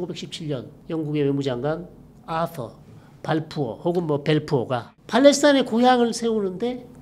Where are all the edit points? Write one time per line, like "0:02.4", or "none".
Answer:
0:04.9